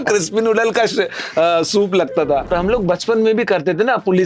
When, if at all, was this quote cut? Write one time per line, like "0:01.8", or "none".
0:02.5